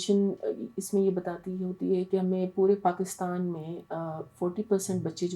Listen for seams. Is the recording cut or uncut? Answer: uncut